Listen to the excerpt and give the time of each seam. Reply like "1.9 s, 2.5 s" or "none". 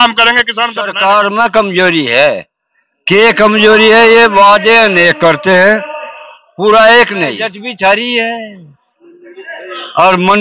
0.9 s, 7.6 s